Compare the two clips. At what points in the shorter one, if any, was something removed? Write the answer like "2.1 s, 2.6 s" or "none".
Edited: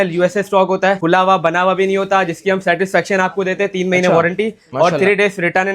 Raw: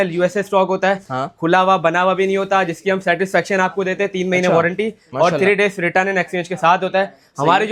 1.0 s